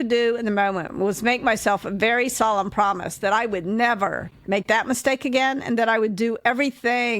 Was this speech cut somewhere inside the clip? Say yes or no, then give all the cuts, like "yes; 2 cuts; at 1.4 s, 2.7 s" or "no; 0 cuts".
yes; 1 cut; at 4.3 s